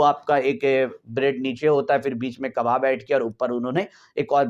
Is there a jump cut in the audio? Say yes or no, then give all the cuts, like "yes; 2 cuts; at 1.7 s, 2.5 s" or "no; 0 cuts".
no; 0 cuts